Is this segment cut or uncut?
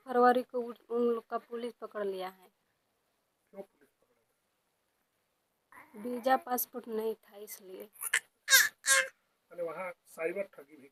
uncut